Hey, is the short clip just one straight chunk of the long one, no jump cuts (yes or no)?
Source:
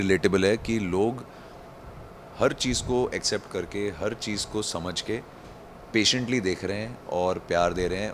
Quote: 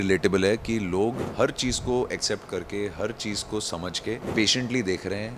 no